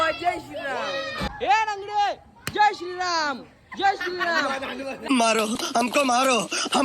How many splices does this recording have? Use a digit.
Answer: 1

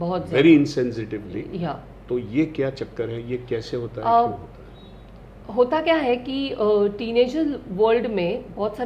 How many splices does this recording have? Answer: 0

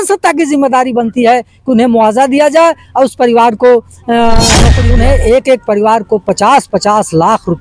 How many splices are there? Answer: 1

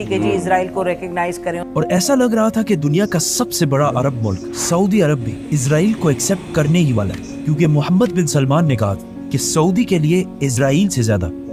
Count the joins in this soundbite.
0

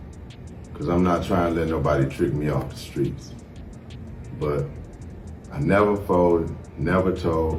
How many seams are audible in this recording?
0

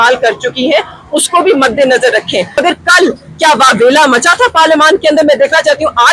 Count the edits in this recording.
1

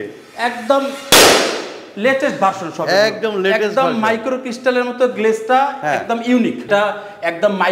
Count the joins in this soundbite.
1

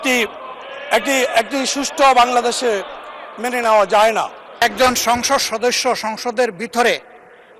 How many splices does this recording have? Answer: 1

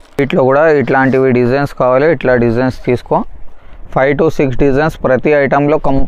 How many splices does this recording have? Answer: 0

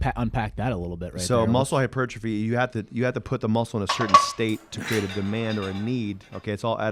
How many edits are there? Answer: 0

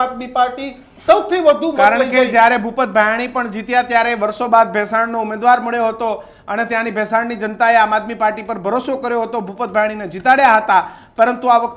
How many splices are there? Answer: 0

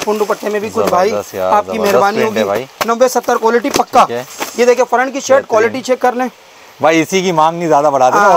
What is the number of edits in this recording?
1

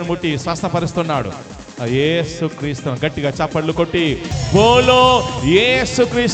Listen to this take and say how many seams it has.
1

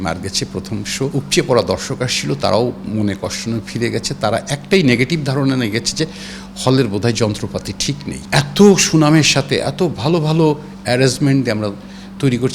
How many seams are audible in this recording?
2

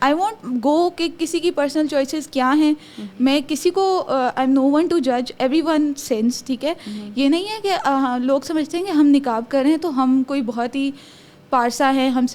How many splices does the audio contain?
0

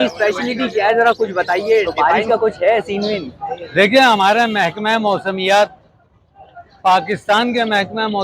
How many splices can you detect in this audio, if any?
1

